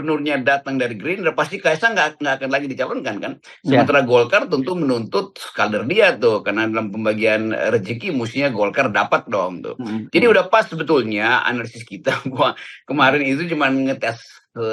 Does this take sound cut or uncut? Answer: uncut